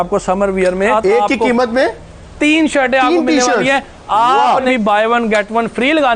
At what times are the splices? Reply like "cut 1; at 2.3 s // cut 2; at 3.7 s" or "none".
cut 1; at 0.9 s // cut 2; at 4.7 s